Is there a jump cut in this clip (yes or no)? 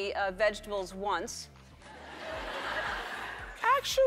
no